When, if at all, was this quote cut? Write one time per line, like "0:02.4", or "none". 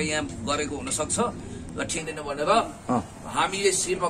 0:02.0